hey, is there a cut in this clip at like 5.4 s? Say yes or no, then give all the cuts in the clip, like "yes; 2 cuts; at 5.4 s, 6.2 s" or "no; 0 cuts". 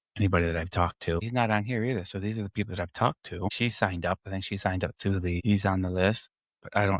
yes; 3 cuts; at 1.3 s, 3.5 s, 5.4 s